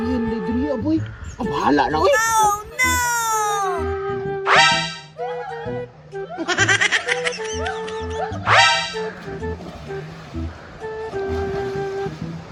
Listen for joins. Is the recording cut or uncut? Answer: uncut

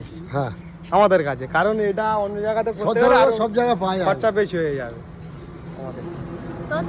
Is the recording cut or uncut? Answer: uncut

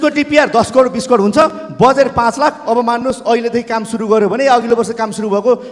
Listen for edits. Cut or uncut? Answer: uncut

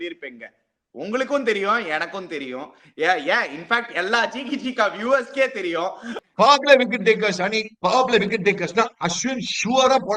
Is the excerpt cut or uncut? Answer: cut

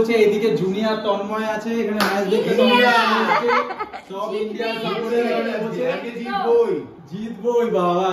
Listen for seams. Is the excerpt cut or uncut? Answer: uncut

